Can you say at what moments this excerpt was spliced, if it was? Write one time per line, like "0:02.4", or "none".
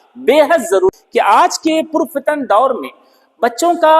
0:00.9